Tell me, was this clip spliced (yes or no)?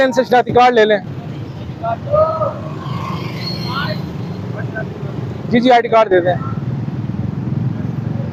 no